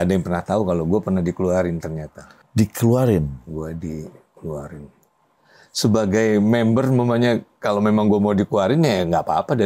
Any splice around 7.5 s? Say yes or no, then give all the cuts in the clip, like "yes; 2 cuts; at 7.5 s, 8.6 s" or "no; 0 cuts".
no; 2 cuts; at 2.3 s, 4.9 s